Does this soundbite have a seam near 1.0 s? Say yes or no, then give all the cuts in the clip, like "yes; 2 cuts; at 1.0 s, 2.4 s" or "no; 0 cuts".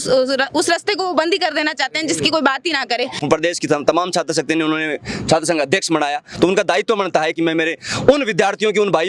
no; 2 cuts; at 3.2 s, 7.3 s